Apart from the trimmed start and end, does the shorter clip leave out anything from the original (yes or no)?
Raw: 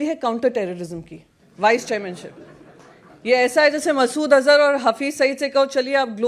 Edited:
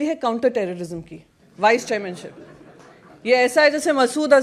no